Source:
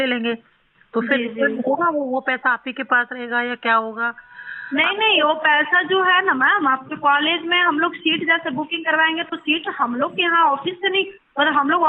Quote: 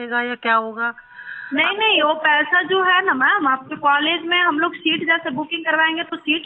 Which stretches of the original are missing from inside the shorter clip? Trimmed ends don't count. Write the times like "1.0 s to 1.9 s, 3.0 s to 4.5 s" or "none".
none